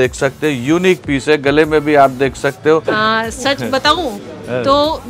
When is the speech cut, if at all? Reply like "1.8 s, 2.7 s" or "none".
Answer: 2.8 s

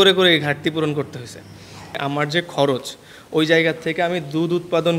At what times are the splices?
2.0 s

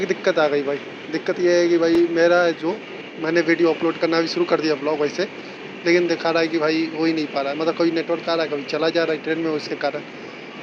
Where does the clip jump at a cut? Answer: none

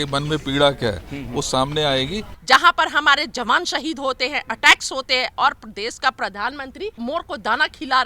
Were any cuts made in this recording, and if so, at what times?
2.3 s, 7.0 s

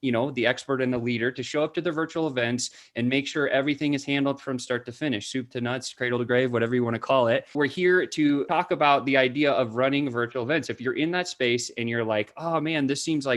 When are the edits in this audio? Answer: 7.5 s, 8.4 s

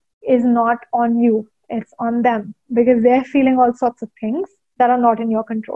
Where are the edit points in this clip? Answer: 4.6 s

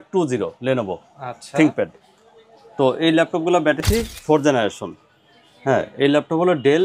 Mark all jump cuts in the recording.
3.8 s

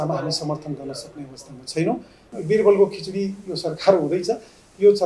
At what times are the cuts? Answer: 2.2 s

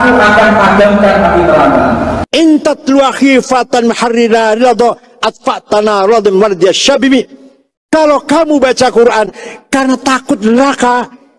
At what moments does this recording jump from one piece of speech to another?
2.2 s

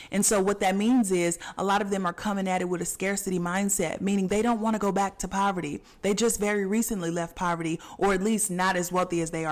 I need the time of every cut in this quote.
5.9 s

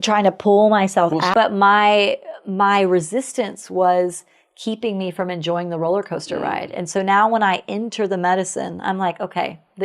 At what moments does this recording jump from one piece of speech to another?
1.3 s

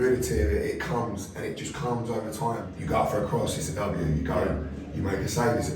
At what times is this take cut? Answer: 2.7 s

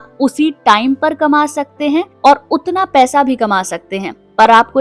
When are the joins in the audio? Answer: 2.1 s

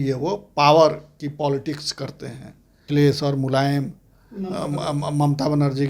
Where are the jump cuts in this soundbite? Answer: 2.8 s

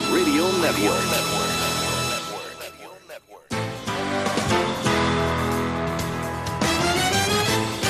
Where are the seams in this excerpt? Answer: none

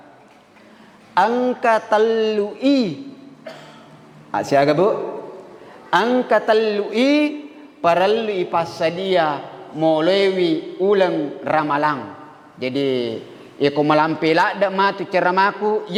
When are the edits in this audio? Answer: none

